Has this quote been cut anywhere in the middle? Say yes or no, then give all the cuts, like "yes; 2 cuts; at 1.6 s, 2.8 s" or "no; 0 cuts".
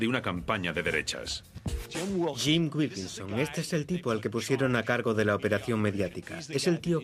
yes; 1 cut; at 4.4 s